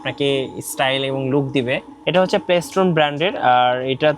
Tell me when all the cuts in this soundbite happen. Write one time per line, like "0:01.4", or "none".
0:02.0